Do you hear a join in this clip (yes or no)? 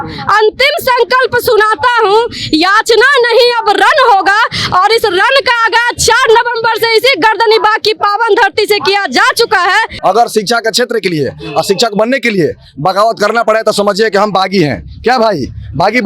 yes